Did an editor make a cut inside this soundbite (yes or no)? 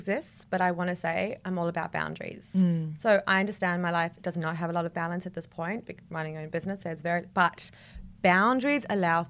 no